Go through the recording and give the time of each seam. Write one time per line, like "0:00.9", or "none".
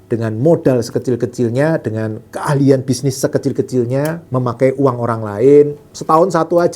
0:05.8